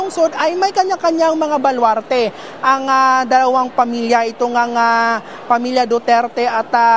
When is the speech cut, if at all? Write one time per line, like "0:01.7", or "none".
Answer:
0:00.7
0:02.3